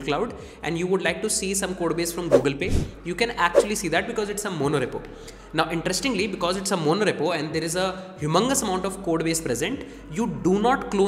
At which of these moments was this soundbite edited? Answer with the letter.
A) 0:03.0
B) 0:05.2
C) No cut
C